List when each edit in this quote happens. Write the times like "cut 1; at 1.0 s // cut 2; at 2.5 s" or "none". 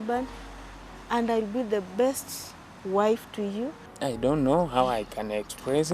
cut 1; at 3.8 s